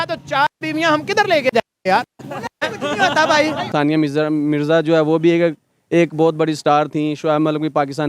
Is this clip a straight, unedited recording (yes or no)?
no